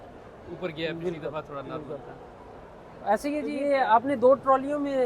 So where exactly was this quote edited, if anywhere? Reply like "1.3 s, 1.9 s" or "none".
3.5 s